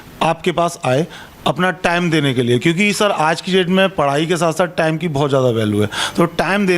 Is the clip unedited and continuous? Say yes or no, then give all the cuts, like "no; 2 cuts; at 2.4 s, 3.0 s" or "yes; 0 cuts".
yes; 0 cuts